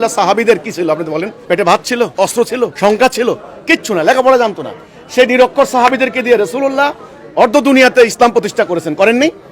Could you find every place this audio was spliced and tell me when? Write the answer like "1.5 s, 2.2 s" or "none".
1.3 s, 2.4 s